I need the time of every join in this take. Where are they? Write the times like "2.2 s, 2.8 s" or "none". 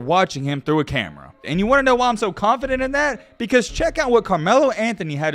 1.5 s